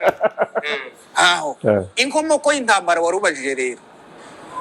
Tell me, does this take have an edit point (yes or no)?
no